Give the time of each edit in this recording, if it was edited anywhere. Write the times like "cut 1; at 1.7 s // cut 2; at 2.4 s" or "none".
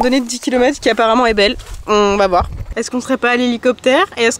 cut 1; at 2.7 s